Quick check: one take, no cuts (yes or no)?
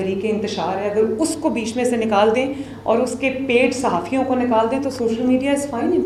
yes